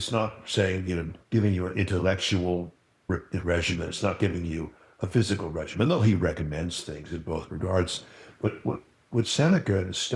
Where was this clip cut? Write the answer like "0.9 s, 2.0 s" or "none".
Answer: 1.1 s, 3.1 s